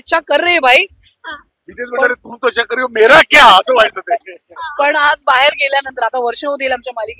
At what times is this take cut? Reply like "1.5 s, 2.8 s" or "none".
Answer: none

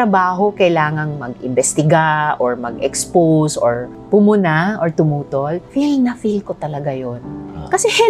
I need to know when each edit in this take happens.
none

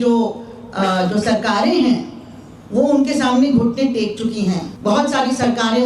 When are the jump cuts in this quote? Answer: 4.7 s

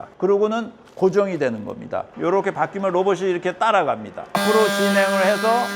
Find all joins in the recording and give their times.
2.2 s, 4.4 s

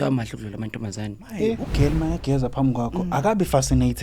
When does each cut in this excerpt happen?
1.7 s

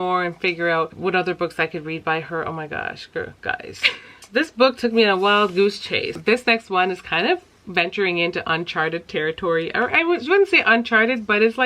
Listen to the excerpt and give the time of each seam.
1.0 s, 4.2 s, 6.2 s

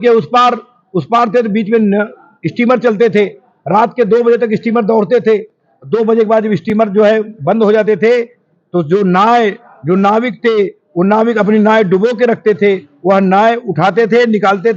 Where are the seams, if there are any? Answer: none

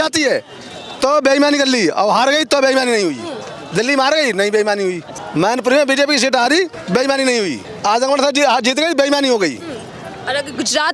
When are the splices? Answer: 5.1 s, 6.8 s, 7.7 s

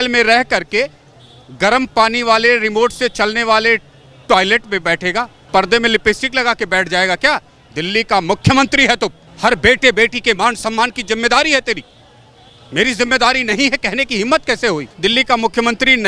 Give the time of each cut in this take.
5.4 s, 9.2 s, 14.9 s

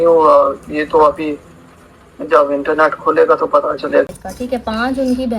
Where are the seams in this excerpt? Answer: 4.1 s

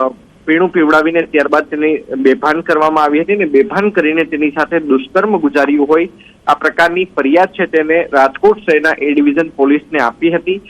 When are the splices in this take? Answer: 9.2 s

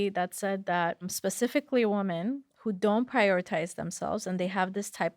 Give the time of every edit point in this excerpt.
1.1 s

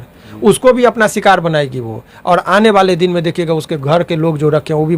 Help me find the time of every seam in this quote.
none

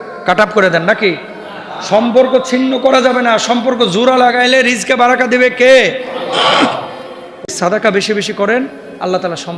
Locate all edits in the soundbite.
7.5 s

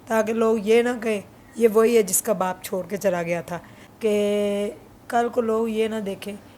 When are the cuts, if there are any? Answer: 3.8 s

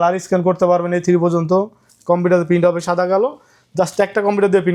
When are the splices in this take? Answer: none

